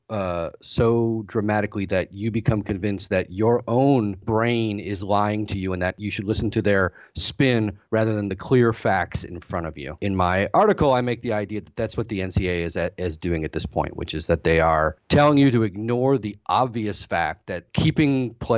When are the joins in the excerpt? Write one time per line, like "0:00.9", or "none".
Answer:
0:04.2
0:09.9
0:15.0
0:17.6